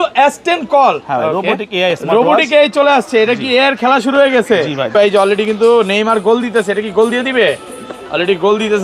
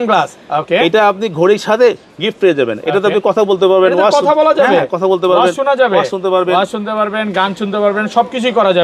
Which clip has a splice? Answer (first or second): first